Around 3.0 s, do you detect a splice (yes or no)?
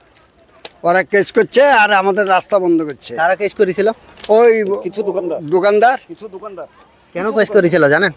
no